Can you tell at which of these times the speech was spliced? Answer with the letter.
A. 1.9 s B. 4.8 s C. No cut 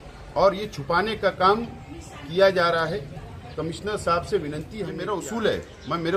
B